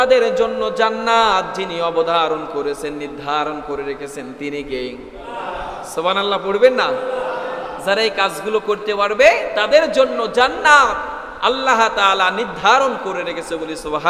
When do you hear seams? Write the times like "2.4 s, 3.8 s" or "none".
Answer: none

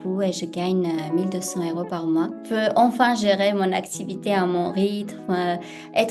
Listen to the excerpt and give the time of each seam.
2.4 s

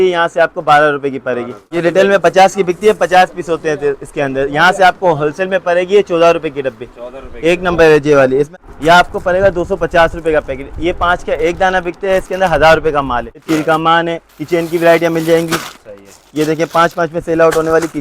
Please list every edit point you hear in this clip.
1.8 s, 8.5 s, 13.4 s

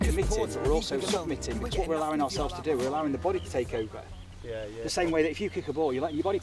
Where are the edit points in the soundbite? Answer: none

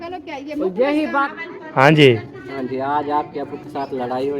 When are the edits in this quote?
1.3 s

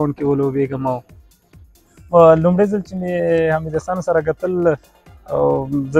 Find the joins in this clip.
1.8 s

